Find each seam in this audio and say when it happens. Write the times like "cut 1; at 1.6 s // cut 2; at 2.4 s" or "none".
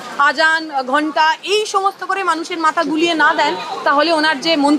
none